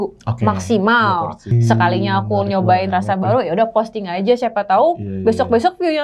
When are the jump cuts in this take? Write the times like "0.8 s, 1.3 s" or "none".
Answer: 1.5 s